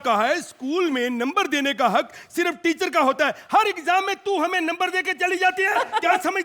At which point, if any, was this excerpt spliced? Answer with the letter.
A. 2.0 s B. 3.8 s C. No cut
C